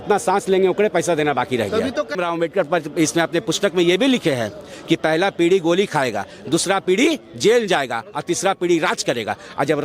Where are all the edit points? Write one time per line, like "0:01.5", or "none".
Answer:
0:02.2